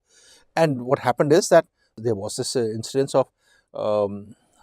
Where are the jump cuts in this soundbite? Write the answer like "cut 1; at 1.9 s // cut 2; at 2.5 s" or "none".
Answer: cut 1; at 1.9 s